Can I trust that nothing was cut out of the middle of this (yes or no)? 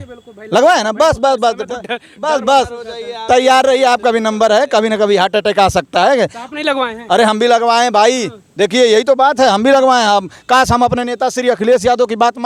yes